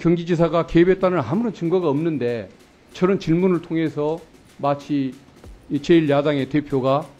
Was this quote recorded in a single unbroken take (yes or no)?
yes